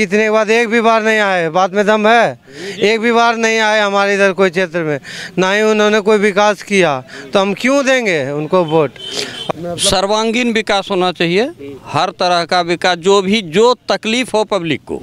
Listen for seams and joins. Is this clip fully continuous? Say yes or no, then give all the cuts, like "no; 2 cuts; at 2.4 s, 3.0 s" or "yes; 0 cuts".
yes; 0 cuts